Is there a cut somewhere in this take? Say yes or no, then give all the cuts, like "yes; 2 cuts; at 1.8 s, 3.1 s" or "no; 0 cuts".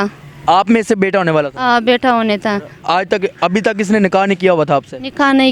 yes; 1 cut; at 2.7 s